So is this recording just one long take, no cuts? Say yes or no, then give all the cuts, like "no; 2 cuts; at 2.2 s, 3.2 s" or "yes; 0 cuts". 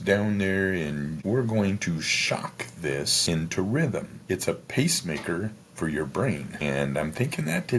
no; 4 cuts; at 1.2 s, 3.1 s, 4.1 s, 6.6 s